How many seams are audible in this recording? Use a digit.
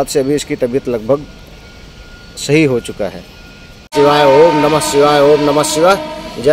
1